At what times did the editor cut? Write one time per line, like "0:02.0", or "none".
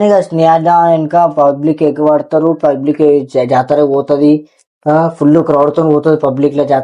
none